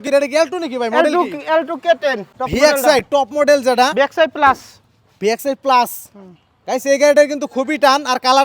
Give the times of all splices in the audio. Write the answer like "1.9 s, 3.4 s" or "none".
2.3 s